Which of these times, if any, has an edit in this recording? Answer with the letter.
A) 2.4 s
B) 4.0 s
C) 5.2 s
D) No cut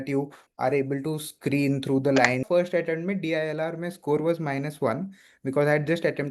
A